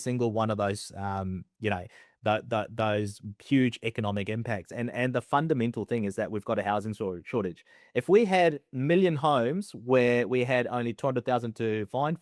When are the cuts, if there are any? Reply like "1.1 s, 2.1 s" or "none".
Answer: none